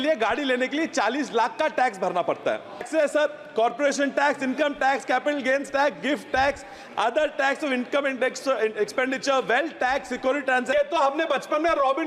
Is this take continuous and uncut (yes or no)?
no